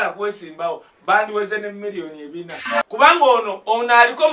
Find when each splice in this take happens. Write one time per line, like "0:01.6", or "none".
0:02.6